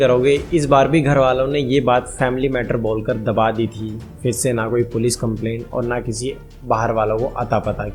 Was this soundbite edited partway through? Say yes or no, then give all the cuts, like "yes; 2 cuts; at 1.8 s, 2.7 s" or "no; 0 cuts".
no; 0 cuts